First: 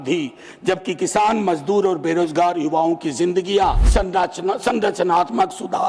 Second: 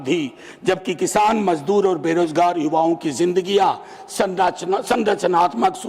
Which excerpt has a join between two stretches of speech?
first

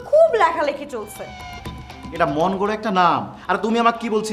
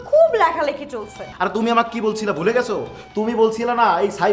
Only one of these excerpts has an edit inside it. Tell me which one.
second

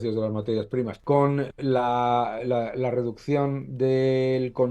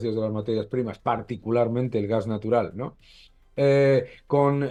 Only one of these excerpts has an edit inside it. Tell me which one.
first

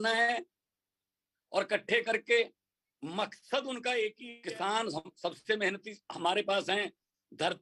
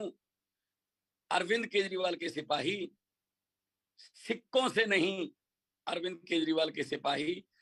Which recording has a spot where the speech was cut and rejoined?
first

